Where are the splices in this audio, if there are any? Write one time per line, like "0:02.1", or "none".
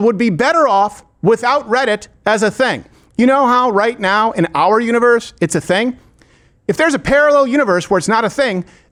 none